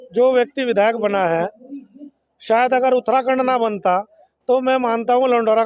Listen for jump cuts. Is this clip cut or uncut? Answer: uncut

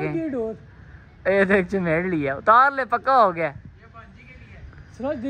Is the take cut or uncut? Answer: uncut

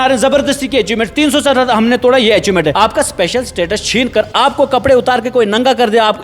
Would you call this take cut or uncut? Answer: cut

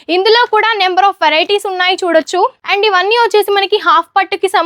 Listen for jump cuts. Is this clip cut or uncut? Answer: cut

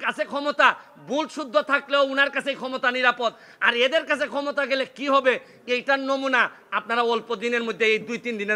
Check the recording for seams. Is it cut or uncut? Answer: uncut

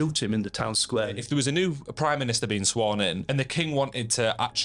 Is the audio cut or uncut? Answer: cut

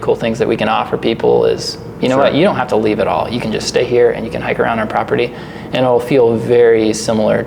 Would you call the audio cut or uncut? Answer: uncut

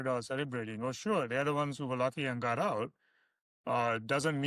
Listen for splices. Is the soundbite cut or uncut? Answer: uncut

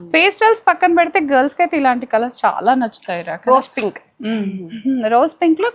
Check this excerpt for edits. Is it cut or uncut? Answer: uncut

